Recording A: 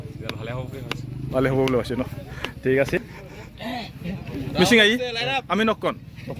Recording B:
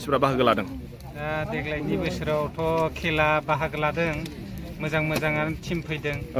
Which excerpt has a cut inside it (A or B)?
A